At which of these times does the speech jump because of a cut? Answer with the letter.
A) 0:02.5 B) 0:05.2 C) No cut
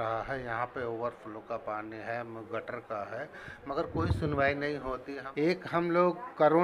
B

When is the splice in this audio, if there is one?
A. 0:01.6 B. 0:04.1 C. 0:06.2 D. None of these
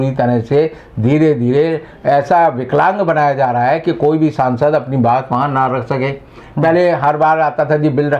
D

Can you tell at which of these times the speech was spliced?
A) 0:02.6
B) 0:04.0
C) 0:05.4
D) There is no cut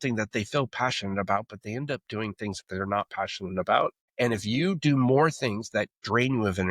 B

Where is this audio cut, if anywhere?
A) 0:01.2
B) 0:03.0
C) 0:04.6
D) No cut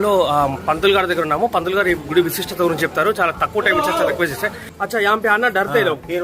C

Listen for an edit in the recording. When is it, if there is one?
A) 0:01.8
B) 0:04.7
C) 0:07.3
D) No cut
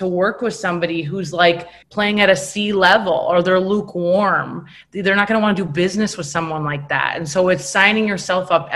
A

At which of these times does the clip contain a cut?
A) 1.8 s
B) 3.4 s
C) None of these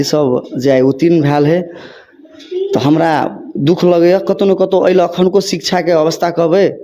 C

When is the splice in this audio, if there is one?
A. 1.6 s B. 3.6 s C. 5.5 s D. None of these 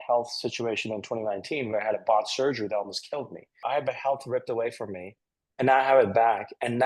B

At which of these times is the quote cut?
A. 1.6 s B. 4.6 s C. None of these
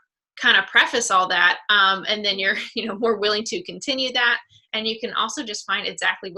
A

